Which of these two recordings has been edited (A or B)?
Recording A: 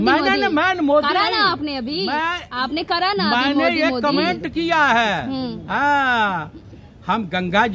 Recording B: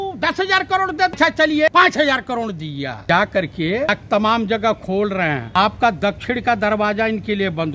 B